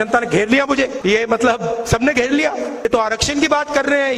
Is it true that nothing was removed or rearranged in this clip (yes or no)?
no